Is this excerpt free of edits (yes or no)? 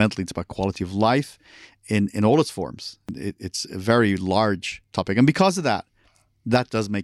no